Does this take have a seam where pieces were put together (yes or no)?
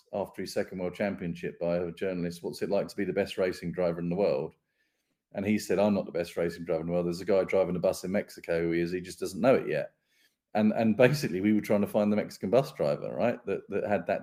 no